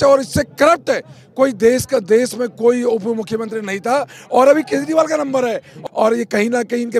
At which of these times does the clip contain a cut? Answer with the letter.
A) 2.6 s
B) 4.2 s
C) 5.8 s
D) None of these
C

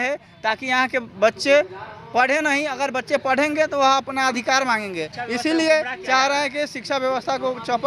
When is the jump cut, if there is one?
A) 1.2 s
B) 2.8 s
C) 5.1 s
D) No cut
D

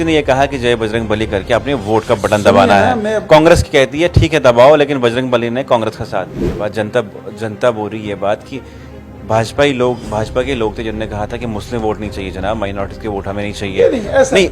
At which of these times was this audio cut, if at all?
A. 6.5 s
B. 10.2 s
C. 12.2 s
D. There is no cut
A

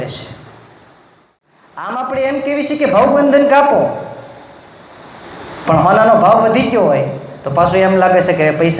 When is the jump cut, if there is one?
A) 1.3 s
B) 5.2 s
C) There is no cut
A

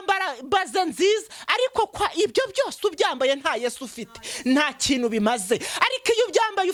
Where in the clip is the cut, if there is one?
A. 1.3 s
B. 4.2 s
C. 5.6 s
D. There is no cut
D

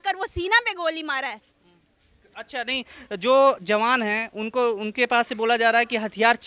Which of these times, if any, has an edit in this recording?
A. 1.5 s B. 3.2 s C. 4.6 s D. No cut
D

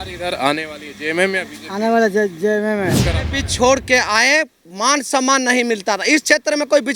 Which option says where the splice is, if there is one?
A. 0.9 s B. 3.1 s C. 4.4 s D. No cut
B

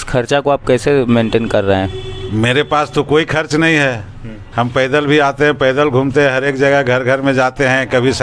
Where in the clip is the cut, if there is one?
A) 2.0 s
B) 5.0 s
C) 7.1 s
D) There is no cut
D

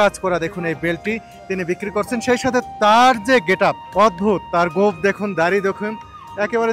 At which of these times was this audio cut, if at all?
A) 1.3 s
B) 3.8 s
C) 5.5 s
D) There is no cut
B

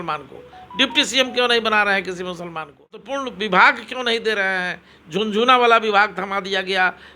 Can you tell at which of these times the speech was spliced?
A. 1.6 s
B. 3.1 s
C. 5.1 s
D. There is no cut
B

